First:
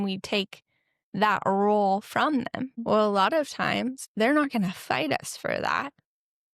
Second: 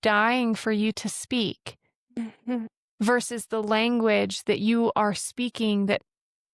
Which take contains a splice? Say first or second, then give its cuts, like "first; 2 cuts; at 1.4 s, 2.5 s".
first; 2 cuts; at 2.7 s, 4.0 s